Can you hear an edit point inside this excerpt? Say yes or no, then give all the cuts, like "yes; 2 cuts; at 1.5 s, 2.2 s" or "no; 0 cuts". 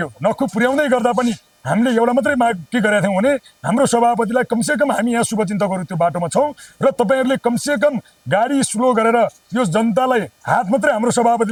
no; 0 cuts